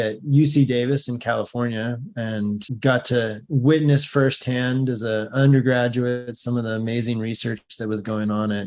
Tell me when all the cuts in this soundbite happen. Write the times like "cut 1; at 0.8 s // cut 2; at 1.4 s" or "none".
none